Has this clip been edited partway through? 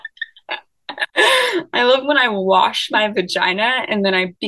no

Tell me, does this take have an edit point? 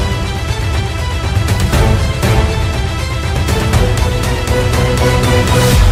no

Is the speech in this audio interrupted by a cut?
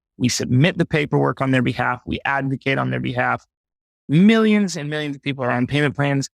yes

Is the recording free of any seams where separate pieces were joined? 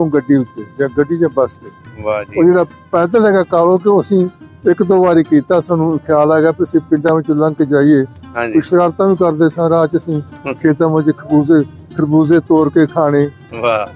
yes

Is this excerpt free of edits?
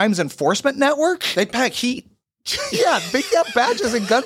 yes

